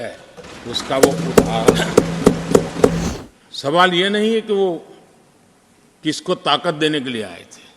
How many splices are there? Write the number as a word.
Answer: one